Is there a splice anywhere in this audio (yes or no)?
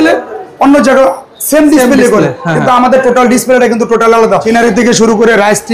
yes